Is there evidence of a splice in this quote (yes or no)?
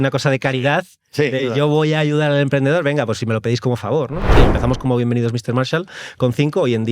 yes